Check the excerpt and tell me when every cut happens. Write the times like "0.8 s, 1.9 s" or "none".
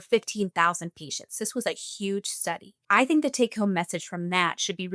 2.7 s